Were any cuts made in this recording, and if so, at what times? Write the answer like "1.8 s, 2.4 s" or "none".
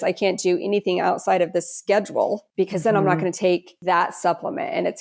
2.5 s, 3.7 s